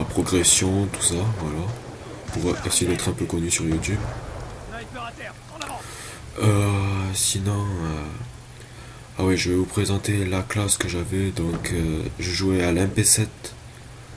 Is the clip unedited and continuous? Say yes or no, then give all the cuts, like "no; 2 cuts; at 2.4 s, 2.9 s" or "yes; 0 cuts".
yes; 0 cuts